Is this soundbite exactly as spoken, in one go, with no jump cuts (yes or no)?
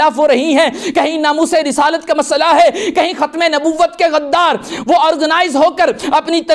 yes